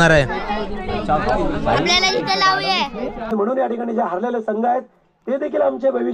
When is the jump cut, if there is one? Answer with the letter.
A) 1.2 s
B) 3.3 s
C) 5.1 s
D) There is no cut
B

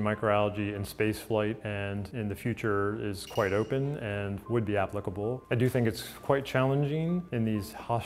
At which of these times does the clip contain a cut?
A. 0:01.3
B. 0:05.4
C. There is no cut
C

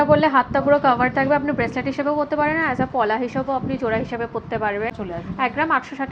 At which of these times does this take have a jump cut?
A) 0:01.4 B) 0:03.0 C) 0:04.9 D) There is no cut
C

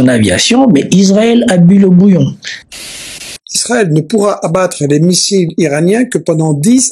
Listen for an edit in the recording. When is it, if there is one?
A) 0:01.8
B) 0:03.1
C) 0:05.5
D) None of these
B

